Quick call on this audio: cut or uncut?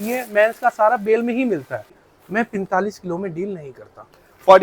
cut